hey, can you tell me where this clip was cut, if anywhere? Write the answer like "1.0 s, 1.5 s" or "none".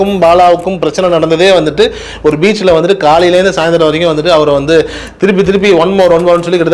none